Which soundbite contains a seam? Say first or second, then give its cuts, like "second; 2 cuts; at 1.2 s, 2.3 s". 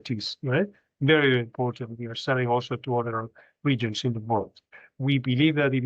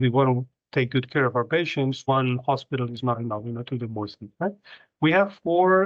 first; 1 cut; at 4.8 s